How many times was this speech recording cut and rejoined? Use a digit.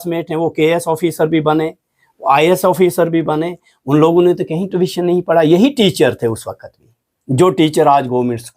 0